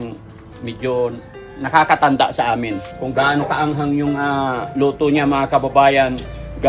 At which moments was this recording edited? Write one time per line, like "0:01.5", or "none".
0:02.8